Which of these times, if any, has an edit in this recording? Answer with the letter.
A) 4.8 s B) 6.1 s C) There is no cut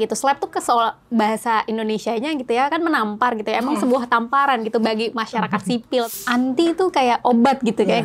B